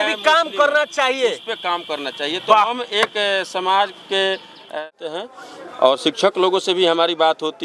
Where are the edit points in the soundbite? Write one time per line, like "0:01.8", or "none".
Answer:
0:04.7